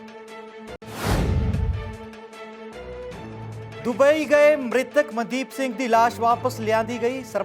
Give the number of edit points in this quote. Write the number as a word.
two